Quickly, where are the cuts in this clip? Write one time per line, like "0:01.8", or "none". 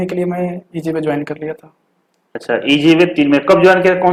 none